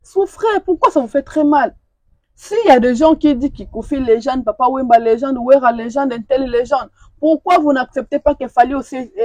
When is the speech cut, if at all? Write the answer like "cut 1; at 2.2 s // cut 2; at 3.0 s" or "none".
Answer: none

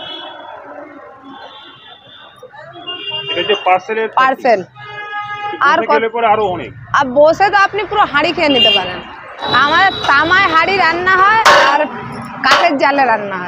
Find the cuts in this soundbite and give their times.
cut 1; at 9.5 s // cut 2; at 11.9 s

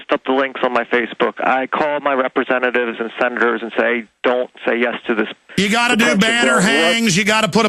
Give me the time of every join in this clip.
none

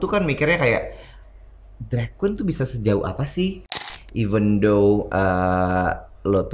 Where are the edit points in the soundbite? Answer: cut 1; at 3.7 s

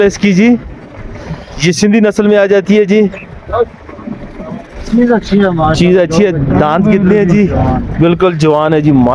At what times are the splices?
none

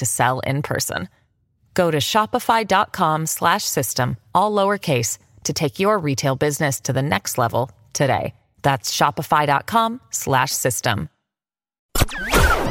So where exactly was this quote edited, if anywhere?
cut 1; at 11.8 s

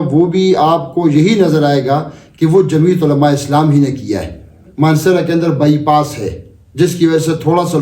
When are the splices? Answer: cut 1; at 4.6 s

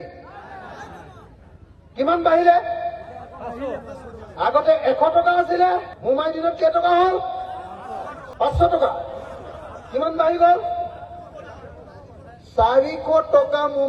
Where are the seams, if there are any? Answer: cut 1; at 5.9 s // cut 2; at 8.2 s

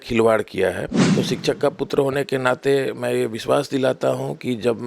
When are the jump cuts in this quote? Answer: cut 1; at 0.9 s

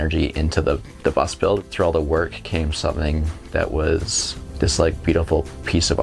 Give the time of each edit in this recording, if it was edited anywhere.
cut 1; at 1.6 s

